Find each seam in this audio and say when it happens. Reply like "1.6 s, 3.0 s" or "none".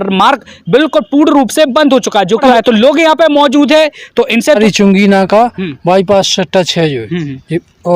2.4 s, 4.6 s